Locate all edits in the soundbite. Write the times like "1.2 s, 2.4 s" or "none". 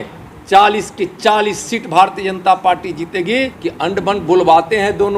3.6 s